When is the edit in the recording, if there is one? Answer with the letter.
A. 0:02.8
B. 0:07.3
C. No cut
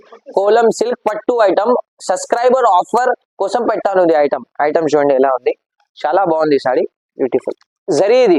C